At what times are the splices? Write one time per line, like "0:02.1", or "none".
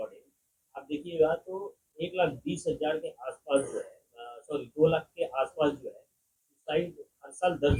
none